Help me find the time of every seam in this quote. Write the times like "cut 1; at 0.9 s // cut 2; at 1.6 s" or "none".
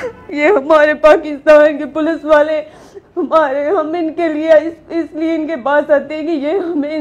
none